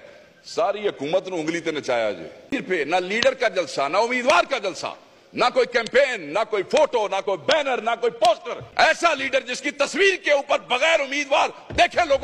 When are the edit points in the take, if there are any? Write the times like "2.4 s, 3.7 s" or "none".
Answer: 2.5 s, 8.6 s